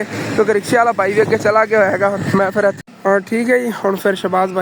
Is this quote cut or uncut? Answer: cut